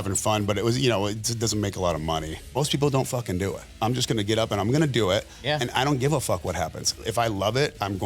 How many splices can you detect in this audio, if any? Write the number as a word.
two